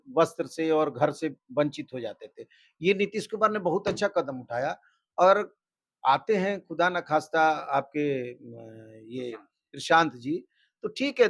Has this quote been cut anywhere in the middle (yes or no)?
no